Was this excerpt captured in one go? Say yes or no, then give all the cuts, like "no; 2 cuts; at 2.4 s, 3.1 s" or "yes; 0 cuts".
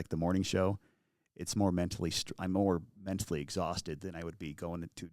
yes; 0 cuts